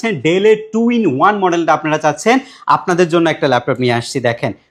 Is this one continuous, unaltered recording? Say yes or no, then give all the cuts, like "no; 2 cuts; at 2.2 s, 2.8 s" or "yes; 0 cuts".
yes; 0 cuts